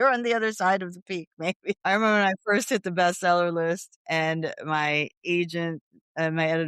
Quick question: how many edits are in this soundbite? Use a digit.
1